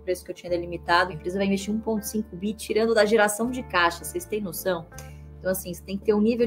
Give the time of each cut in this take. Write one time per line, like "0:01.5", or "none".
0:01.2